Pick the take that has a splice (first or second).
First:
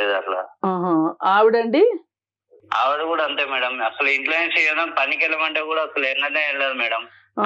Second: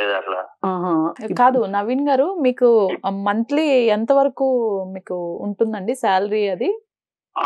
second